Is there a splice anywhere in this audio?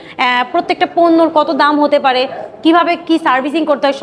no; 0 cuts

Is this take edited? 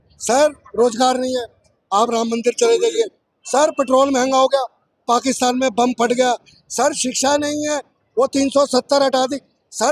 no; 0 cuts

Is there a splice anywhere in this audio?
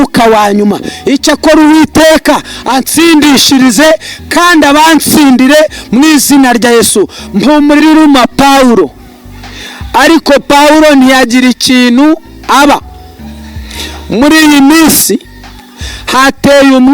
yes; 1 cut; at 7.8 s

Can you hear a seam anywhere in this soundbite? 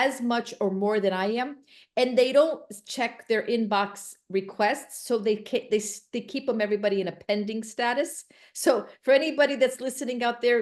no; 0 cuts

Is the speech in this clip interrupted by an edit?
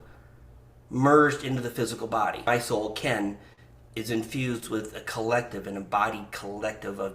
yes; 1 cut; at 2.5 s

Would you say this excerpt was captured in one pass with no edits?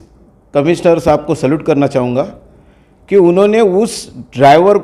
yes; 0 cuts

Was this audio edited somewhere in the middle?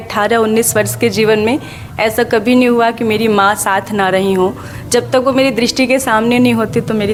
no; 0 cuts

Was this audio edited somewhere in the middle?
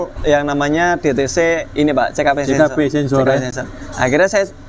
no; 0 cuts

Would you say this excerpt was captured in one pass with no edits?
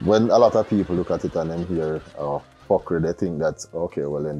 no; 1 cut; at 2.6 s

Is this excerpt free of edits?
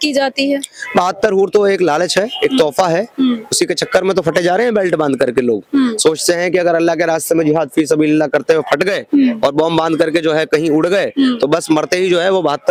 yes; 0 cuts

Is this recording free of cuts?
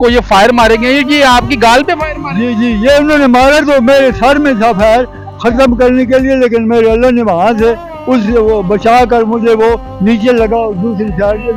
yes; 0 cuts

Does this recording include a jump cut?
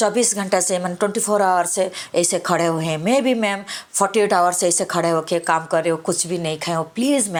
no; 0 cuts

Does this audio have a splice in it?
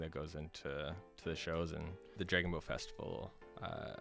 yes; 1 cut; at 2.2 s

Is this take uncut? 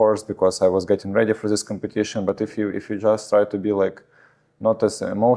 yes; 0 cuts

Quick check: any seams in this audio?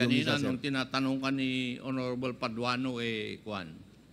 no; 0 cuts

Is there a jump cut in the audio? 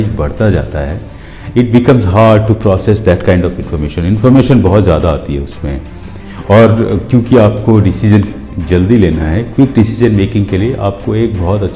no; 0 cuts

